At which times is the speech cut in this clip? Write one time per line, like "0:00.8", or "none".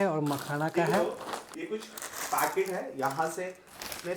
0:01.0